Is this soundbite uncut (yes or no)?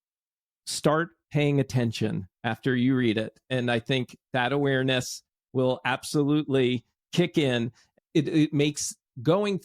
no